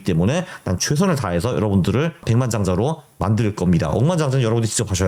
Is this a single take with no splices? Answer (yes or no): yes